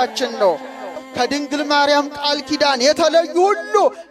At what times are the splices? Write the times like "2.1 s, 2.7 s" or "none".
1.0 s